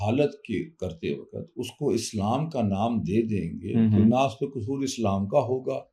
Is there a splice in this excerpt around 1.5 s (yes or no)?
no